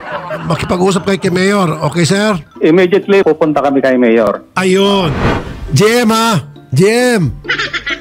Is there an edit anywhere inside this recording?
yes; 1 cut; at 3.2 s

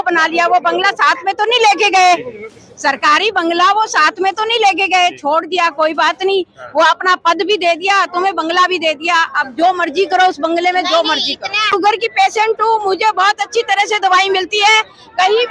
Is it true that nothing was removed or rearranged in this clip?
no; 1 cut; at 11.7 s

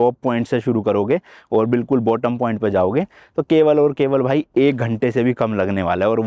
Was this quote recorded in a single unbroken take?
yes; 0 cuts

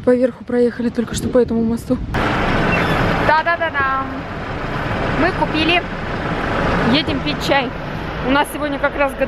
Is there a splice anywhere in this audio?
yes; 1 cut; at 2.1 s

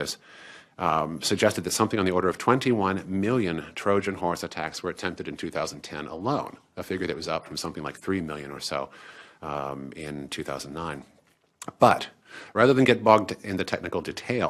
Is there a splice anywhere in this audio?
no; 0 cuts

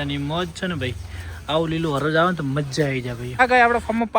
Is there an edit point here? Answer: yes; 1 cut; at 3.3 s

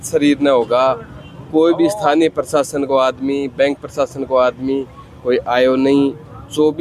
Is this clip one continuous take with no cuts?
yes; 0 cuts

